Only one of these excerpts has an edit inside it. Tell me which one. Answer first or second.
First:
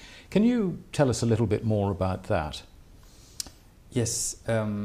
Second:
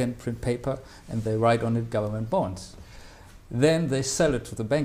second